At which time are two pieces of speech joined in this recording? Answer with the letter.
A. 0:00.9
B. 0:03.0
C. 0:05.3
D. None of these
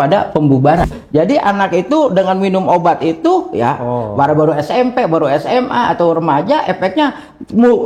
A